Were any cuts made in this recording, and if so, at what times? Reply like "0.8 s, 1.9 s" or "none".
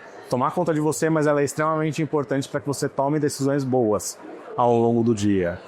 none